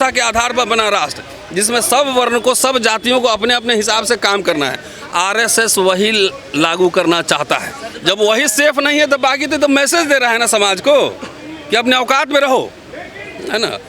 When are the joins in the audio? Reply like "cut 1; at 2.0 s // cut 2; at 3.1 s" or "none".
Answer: cut 1; at 7.8 s